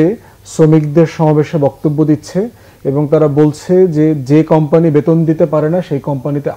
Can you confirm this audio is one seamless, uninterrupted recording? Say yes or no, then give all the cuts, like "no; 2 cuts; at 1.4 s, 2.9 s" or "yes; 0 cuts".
yes; 0 cuts